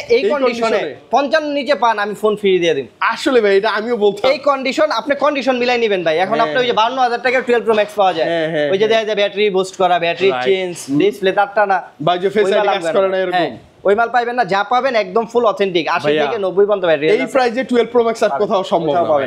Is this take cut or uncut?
uncut